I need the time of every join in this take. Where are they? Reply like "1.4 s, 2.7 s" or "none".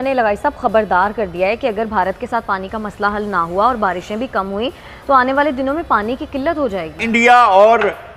7.0 s

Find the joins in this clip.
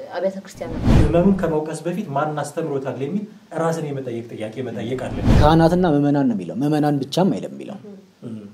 0.8 s, 5.3 s

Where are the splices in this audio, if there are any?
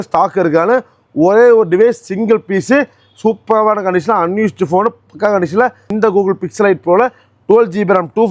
5.9 s

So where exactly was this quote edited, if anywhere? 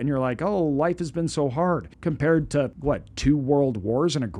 1.9 s, 2.7 s

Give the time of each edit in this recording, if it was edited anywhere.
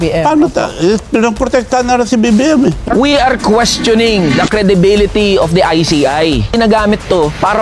2.8 s

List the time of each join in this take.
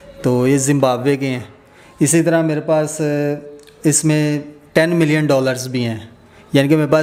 none

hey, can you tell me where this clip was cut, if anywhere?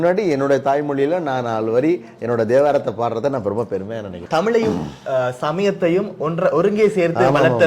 none

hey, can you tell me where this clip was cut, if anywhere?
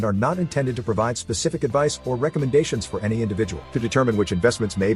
none

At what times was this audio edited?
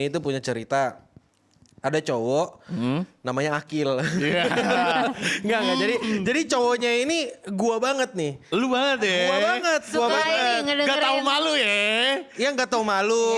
none

